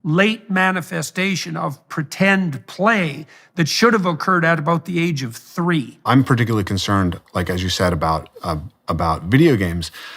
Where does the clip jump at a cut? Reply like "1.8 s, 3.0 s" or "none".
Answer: 5.9 s